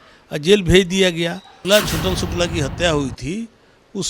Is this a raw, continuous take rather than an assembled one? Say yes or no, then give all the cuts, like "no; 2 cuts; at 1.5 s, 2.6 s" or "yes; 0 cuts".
no; 1 cut; at 1.5 s